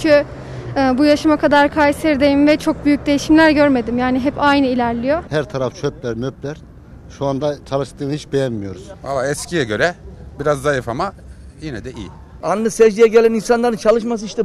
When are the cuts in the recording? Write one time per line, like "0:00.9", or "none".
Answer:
0:05.2
0:08.9
0:12.3